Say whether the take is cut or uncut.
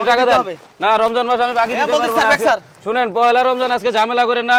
uncut